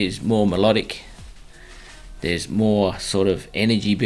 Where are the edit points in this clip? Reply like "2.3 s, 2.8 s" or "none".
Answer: none